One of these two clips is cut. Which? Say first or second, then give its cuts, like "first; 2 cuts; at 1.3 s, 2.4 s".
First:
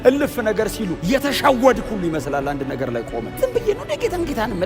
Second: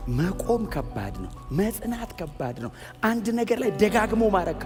first; 2 cuts; at 1.0 s, 3.3 s